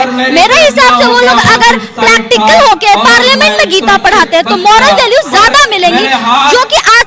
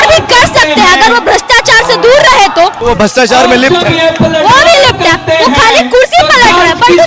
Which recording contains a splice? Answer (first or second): second